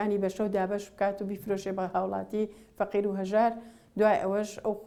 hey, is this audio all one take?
yes; 0 cuts

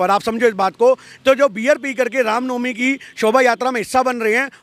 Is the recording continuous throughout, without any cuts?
yes; 0 cuts

